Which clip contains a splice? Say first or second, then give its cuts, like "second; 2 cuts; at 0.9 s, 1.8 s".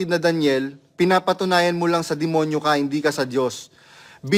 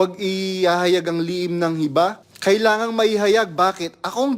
second; 1 cut; at 2.3 s